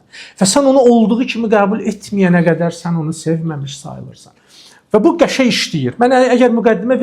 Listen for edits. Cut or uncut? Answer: uncut